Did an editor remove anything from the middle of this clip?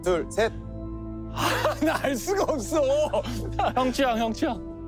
no; 0 cuts

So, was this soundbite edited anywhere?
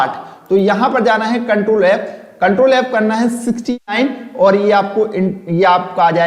no; 0 cuts

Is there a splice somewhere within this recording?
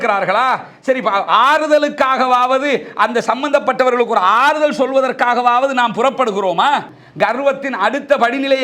yes; 1 cut; at 7.0 s

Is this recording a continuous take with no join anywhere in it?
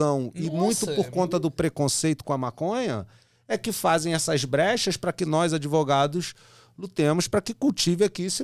yes; 0 cuts

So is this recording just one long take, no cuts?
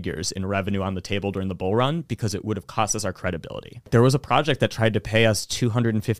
no; 1 cut; at 3.9 s

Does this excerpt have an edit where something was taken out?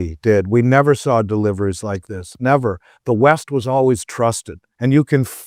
no; 0 cuts

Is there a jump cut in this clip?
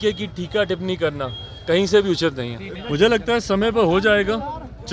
no; 0 cuts

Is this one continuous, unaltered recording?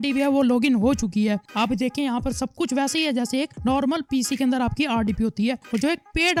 yes; 0 cuts

